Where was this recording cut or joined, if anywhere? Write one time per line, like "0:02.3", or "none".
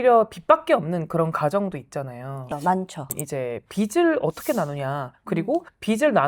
0:03.0